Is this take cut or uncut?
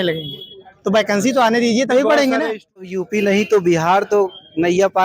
cut